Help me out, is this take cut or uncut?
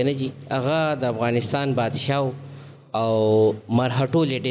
uncut